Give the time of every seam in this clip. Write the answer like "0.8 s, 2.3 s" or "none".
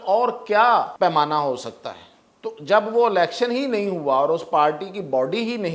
0.9 s